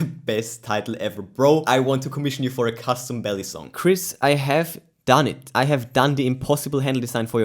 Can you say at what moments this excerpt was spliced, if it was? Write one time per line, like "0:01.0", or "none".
0:03.7
0:05.4